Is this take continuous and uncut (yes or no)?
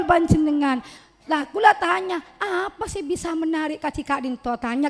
no